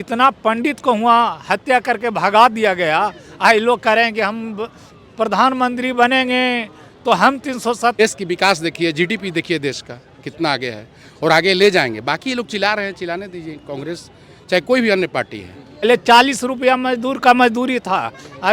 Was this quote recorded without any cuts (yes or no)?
no